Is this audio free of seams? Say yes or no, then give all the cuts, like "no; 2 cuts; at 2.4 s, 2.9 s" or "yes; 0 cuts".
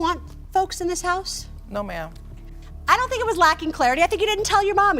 no; 1 cut; at 2.5 s